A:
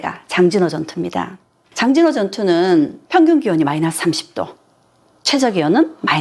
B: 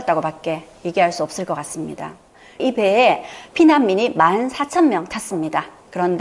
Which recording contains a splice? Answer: B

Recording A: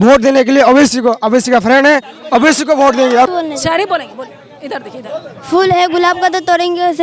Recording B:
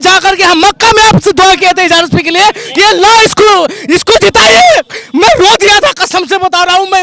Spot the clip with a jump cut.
A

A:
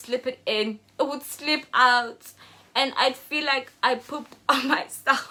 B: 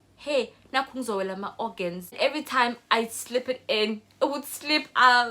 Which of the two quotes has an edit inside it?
B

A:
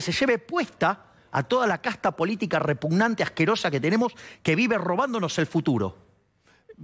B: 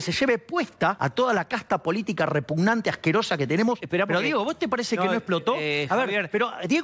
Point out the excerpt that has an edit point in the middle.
B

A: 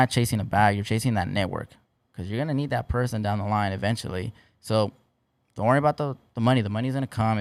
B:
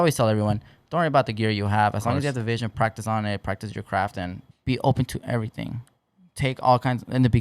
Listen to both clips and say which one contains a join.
B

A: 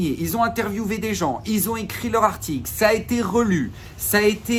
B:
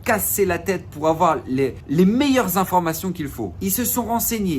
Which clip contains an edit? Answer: B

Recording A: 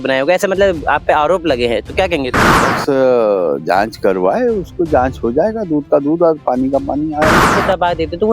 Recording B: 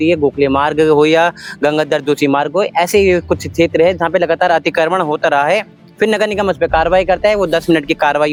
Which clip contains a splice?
A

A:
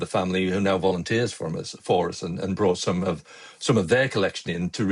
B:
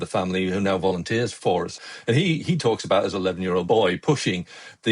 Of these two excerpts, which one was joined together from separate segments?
B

